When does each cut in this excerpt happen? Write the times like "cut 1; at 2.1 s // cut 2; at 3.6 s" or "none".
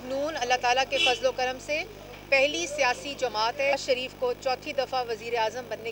cut 1; at 3.7 s